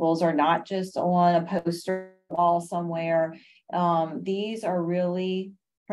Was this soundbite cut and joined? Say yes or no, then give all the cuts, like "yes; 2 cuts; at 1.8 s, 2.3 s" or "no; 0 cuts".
no; 0 cuts